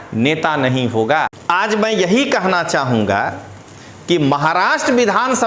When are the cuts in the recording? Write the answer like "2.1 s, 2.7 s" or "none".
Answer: 1.3 s